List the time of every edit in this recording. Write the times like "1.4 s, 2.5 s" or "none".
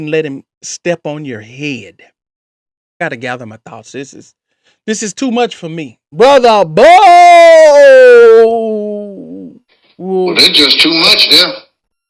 3.0 s